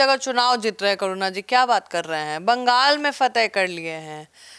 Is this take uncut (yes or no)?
yes